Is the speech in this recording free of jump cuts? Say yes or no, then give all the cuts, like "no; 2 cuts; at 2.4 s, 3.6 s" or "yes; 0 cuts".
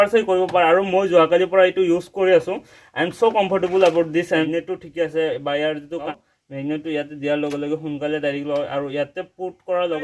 no; 2 cuts; at 4.5 s, 6.1 s